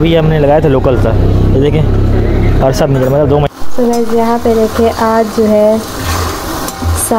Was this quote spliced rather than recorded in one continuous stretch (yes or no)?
yes